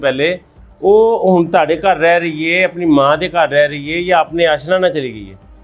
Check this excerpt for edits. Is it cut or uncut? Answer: uncut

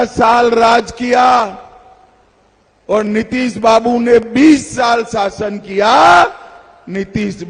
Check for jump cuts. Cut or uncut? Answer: uncut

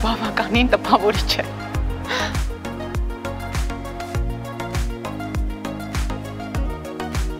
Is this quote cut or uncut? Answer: uncut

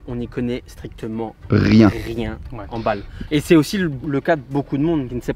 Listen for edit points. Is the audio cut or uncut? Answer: uncut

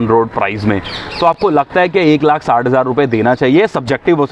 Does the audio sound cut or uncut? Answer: uncut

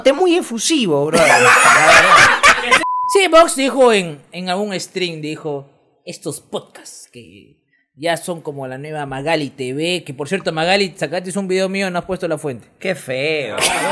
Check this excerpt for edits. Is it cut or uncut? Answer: cut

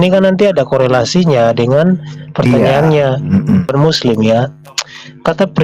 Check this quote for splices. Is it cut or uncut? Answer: cut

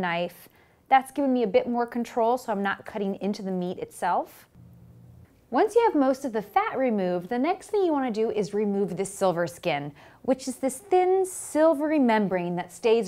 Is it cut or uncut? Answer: uncut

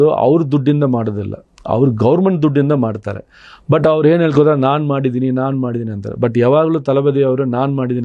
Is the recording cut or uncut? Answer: uncut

